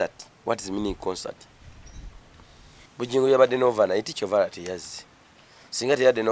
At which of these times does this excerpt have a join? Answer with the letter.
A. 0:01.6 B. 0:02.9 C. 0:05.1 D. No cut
B